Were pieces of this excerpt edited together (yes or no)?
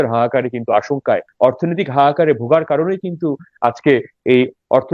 yes